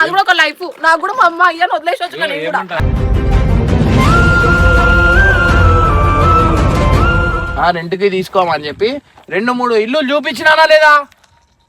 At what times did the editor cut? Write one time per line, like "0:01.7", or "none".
0:07.4